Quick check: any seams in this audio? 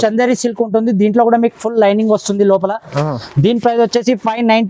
no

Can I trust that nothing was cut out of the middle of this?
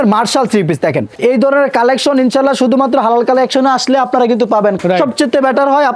no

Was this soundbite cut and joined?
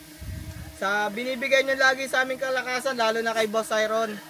no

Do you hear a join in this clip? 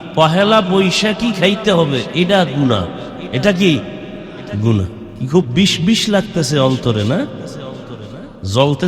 yes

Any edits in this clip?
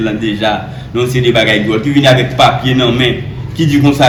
no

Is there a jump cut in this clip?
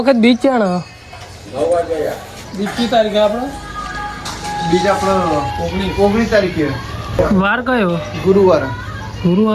yes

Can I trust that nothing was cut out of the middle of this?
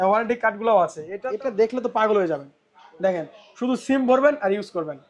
no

